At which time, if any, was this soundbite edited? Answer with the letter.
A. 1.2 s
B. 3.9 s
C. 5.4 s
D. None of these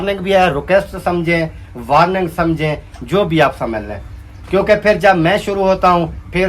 D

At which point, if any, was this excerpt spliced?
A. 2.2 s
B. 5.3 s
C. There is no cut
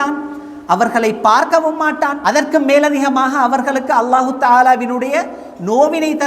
A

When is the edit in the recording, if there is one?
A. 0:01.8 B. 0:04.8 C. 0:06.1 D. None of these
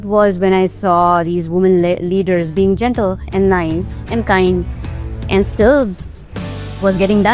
D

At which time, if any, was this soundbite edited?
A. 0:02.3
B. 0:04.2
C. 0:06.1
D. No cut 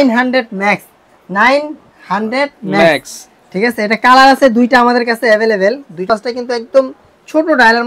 C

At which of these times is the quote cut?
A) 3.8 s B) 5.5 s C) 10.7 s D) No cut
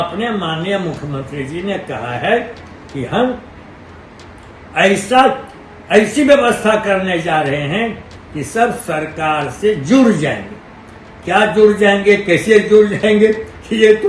D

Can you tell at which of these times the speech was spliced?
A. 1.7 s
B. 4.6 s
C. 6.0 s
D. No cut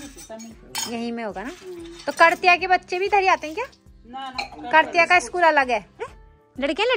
C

